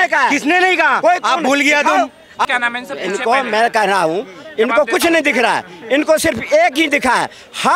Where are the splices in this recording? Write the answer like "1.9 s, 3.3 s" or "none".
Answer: 2.5 s